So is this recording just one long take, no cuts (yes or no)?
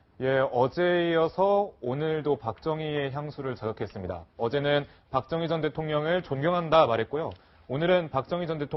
yes